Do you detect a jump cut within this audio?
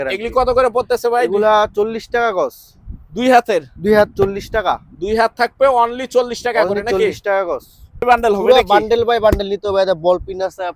yes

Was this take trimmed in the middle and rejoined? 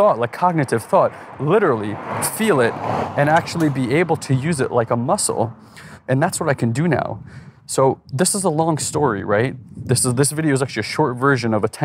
no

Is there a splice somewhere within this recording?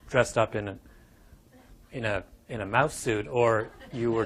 yes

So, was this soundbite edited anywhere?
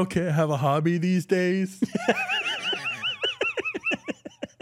no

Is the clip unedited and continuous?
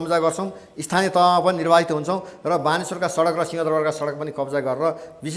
yes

